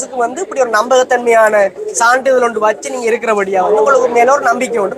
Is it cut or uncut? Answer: uncut